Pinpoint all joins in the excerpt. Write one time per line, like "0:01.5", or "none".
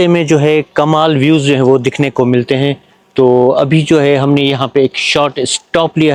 none